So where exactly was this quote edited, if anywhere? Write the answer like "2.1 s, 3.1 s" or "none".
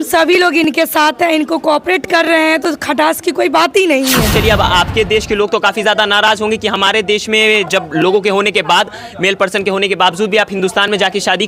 4.4 s